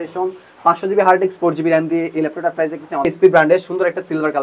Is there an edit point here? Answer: yes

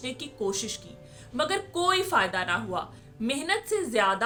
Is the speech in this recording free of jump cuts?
yes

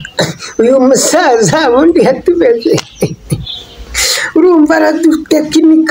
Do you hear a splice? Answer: no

